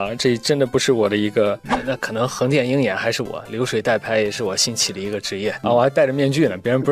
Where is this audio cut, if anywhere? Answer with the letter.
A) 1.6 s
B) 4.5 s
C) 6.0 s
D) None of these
A